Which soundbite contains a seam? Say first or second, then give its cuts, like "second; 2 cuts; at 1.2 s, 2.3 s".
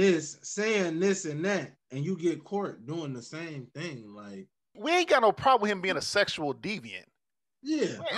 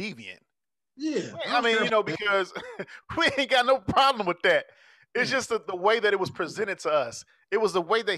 first; 1 cut; at 4.8 s